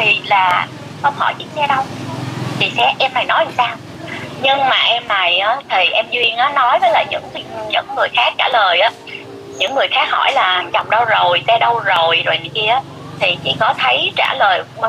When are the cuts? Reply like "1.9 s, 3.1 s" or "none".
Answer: none